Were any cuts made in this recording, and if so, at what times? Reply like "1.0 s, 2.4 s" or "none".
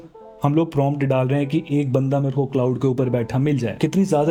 none